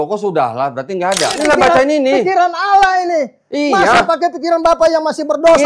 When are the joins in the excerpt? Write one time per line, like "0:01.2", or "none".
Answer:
0:01.4